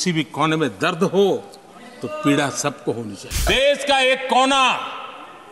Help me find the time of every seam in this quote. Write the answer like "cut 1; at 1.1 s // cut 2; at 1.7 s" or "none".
cut 1; at 3.4 s